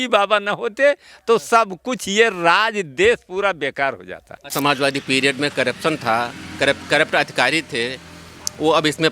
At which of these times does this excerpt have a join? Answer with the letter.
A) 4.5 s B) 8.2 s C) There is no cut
A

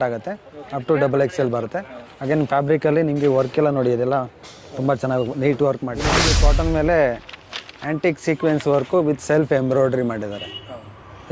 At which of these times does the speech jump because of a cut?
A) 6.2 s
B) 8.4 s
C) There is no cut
A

